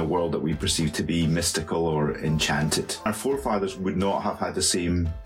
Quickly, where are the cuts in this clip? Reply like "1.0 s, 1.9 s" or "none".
3.1 s